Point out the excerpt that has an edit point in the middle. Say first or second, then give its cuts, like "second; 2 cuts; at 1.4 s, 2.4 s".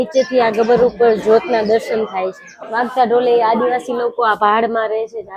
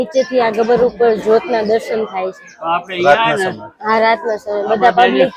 first; 1 cut; at 2.5 s